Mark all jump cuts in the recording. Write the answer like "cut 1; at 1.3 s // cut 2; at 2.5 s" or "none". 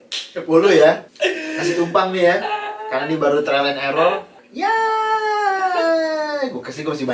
cut 1; at 1.1 s // cut 2; at 4.4 s

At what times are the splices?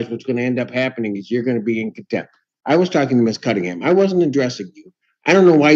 none

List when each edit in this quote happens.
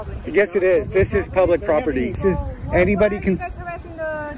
cut 1; at 2.2 s

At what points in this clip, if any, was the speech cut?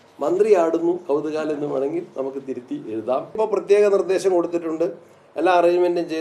cut 1; at 3.4 s

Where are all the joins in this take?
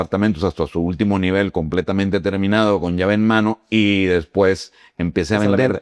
none

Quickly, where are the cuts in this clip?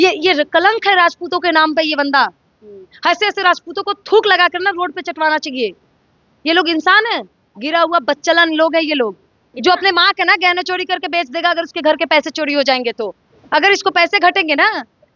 none

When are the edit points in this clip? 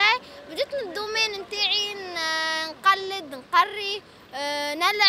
none

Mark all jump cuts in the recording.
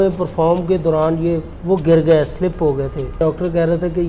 cut 1; at 1.5 s // cut 2; at 3.2 s

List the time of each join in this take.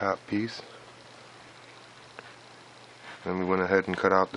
cut 1; at 2.1 s

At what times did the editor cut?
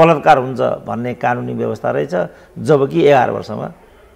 none

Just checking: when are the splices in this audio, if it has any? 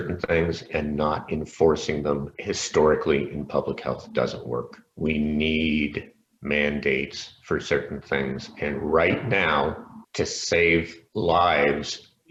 none

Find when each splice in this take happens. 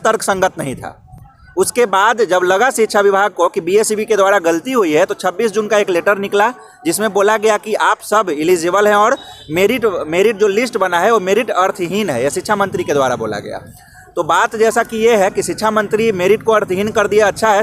none

